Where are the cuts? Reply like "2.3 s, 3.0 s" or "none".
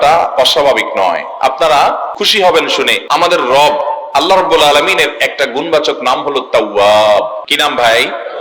2.2 s, 3.0 s, 7.4 s